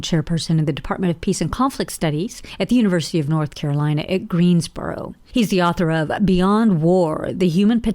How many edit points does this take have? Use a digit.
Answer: 1